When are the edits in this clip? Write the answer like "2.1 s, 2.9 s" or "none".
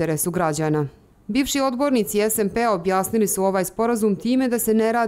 0.9 s